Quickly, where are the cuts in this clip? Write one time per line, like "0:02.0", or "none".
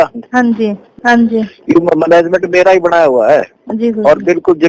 0:00.9